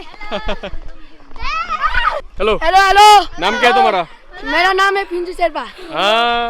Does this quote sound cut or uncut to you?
cut